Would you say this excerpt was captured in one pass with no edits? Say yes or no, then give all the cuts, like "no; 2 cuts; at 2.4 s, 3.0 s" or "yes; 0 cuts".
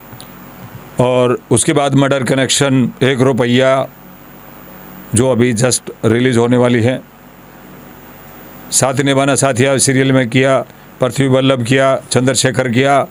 yes; 0 cuts